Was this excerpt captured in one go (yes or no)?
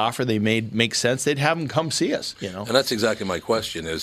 yes